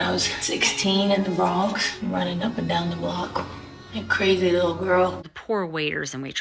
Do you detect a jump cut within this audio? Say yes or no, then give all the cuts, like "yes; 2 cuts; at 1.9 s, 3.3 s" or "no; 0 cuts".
yes; 1 cut; at 5.3 s